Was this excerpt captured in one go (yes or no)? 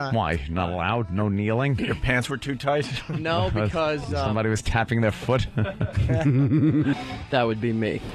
yes